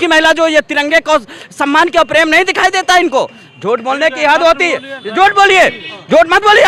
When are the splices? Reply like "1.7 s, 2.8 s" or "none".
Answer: none